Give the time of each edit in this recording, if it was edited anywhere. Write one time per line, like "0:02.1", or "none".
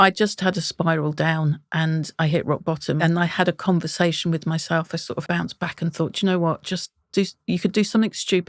0:03.0
0:05.2